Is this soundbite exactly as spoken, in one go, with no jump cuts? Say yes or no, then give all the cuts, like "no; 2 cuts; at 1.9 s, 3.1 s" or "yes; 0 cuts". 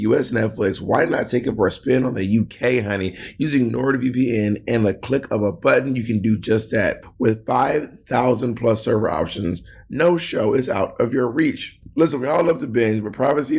no; 1 cut; at 7.1 s